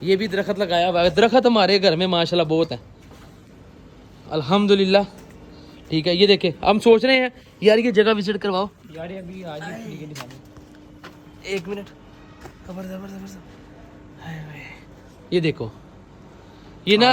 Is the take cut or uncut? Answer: uncut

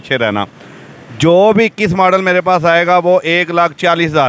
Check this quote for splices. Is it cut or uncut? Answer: uncut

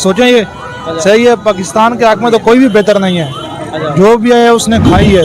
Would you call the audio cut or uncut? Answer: uncut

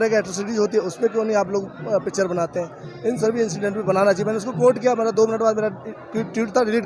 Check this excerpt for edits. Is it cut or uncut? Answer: uncut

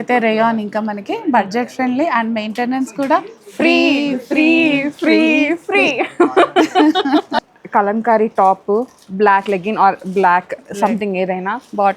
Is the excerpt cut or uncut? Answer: cut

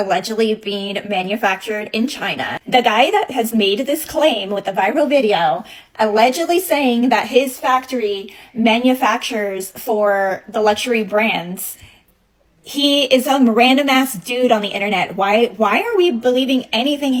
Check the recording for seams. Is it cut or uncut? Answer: uncut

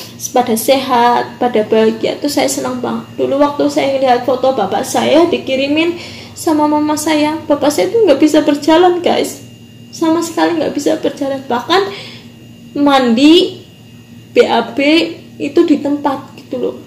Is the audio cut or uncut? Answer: uncut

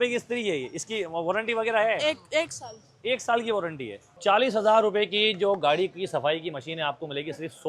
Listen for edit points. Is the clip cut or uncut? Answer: cut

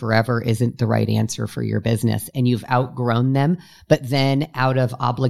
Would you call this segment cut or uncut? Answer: uncut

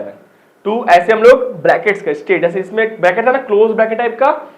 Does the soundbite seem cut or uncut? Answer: uncut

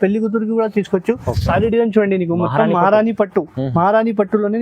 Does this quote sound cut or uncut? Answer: cut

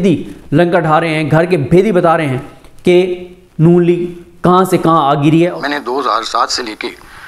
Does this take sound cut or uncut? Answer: cut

